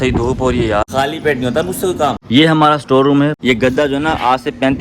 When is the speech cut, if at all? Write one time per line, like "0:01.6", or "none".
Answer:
0:00.9
0:02.2
0:03.4

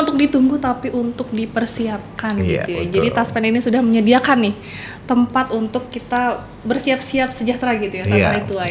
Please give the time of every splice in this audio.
none

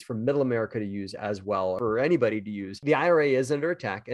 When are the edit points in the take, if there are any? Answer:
0:02.8

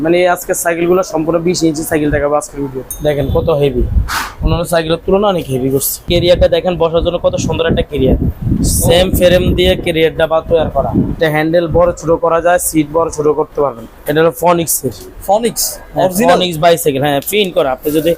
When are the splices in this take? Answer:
0:02.8
0:06.0
0:11.2
0:14.0

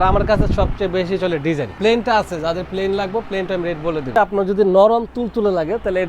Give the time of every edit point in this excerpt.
0:01.7
0:04.2

